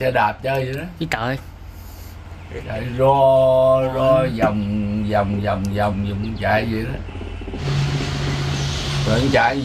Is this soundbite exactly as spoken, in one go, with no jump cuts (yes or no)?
no